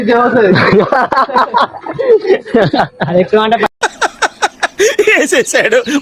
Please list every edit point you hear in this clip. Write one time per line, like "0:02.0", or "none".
none